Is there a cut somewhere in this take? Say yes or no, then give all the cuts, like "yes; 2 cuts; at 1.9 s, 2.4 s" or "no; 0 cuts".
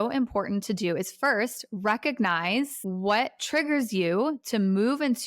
yes; 1 cut; at 2.8 s